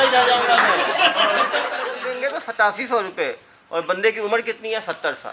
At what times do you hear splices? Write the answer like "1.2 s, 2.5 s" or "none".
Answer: 2.0 s